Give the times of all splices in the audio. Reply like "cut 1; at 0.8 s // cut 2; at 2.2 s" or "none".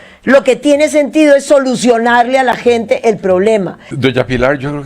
cut 1; at 3.8 s